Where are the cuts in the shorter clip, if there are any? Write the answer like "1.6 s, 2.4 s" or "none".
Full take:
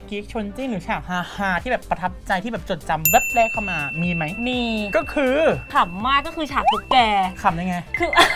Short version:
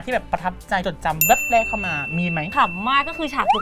0.8 s, 2.5 s